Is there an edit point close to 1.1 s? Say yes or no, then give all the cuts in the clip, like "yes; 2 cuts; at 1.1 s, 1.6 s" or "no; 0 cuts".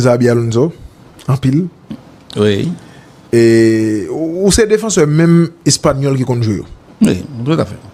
no; 0 cuts